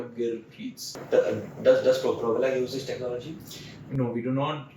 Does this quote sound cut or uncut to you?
cut